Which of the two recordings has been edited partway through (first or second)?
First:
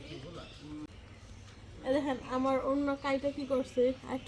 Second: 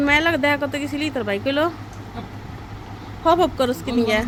first